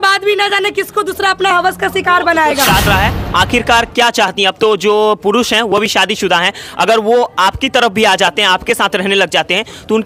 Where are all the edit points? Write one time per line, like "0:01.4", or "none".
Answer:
0:02.9